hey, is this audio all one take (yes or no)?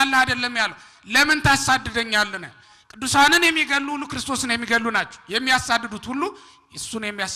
yes